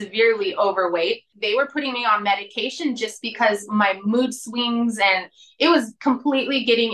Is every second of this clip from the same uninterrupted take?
no; 1 cut; at 1.4 s

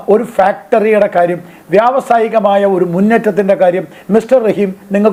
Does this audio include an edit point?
no; 0 cuts

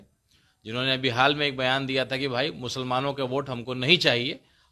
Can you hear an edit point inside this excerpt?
no; 0 cuts

